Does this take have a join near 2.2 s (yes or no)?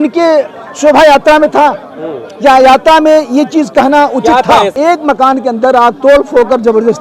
no